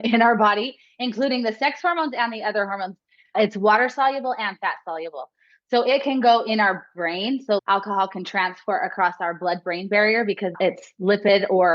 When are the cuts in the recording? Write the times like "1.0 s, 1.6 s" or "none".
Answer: 3.3 s, 7.6 s, 10.6 s